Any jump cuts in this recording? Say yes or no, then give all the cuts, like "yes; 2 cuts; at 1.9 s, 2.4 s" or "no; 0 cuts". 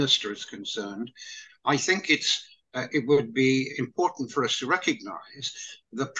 no; 0 cuts